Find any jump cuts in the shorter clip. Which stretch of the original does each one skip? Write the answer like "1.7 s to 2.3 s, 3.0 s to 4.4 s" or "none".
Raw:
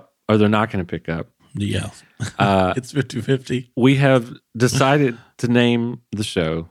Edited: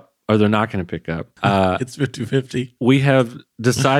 1.3 s to 2.2 s